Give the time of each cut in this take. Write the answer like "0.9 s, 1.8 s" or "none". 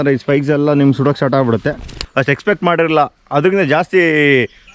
2.1 s